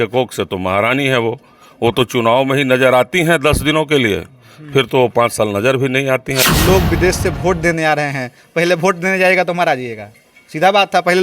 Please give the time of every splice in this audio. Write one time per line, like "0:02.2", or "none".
0:06.4